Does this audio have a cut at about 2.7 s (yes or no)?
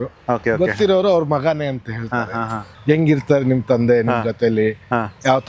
yes